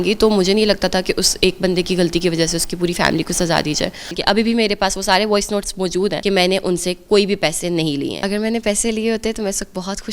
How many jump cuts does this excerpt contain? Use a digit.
3